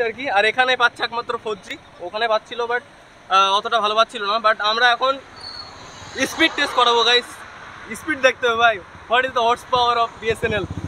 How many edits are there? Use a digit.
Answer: 0